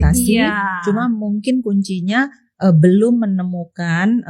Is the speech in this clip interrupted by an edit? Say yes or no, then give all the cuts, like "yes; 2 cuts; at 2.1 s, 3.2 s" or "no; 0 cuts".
no; 0 cuts